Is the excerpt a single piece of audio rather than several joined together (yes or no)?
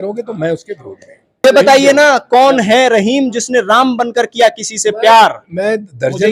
no